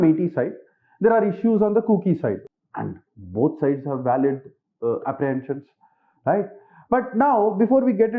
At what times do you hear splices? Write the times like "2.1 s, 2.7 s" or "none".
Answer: 2.4 s